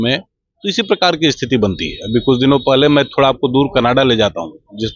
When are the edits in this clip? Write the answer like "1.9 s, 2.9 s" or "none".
none